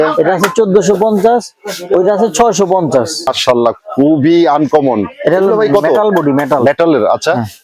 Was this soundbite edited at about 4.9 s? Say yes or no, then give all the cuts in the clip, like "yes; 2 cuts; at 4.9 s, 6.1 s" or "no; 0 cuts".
no; 1 cut; at 3.3 s